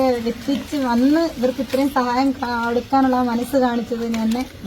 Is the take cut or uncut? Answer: uncut